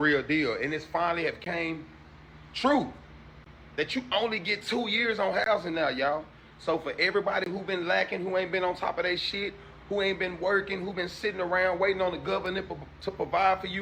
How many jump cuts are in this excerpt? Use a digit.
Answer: 0